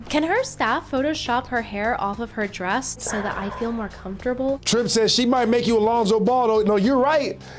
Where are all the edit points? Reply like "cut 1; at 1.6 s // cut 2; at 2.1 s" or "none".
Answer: cut 1; at 3.0 s // cut 2; at 4.6 s